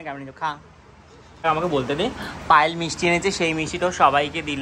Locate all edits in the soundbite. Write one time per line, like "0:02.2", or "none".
0:01.4

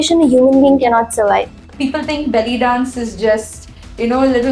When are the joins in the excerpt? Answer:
0:01.7

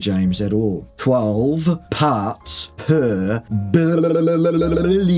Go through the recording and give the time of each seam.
none

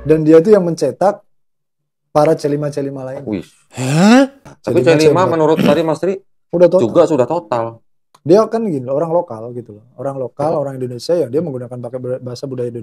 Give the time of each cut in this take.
0:03.6
0:04.5

